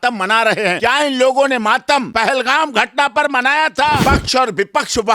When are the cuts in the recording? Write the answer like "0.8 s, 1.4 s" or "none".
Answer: 0.8 s, 2.1 s, 4.0 s